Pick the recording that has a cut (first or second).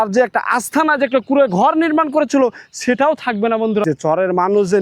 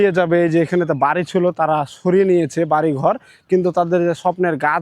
first